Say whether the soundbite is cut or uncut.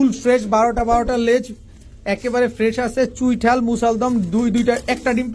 uncut